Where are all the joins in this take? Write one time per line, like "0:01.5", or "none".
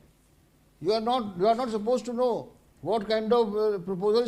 none

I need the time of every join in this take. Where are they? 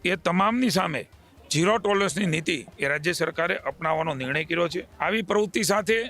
0:04.9

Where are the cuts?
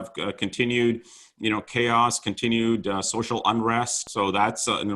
0:04.0

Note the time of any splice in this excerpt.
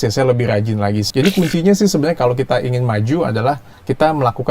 0:01.1

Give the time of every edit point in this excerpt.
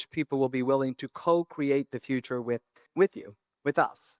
0:02.8

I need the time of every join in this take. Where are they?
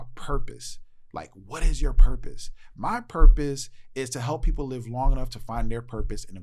none

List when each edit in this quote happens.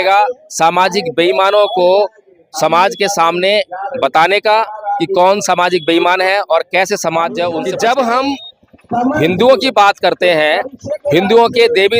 0:07.6

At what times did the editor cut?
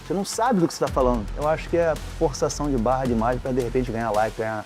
0:01.3

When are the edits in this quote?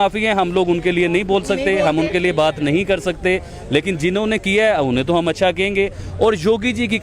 none

